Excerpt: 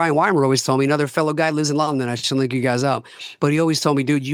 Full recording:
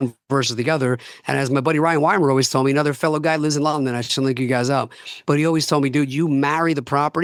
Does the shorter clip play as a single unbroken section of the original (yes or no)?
yes